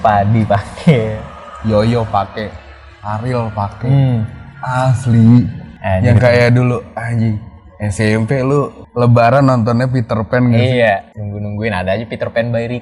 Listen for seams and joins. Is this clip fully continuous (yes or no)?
yes